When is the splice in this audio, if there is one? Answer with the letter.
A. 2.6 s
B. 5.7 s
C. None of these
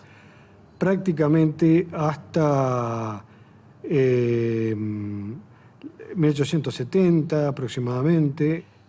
A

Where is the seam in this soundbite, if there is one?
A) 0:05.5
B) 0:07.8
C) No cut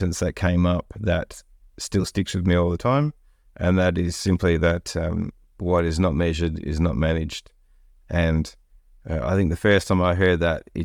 C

